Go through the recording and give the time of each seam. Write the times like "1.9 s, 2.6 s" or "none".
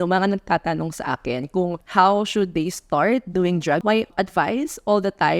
1.8 s, 4.0 s